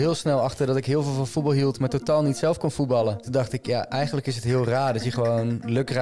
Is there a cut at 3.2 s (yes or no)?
yes